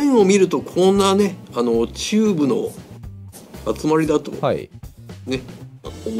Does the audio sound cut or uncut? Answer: uncut